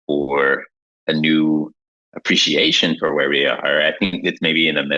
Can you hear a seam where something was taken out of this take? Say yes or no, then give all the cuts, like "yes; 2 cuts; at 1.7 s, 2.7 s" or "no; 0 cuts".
no; 0 cuts